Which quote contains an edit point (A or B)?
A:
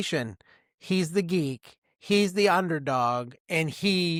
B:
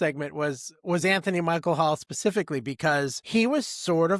B